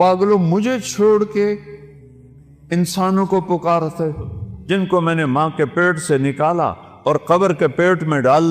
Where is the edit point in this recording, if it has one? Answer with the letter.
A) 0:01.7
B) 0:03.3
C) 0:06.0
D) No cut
D